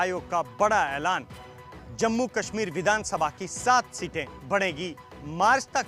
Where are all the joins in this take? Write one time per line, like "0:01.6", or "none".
none